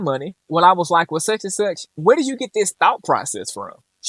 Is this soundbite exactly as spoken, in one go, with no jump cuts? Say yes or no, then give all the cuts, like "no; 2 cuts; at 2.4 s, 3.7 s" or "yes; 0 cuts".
yes; 0 cuts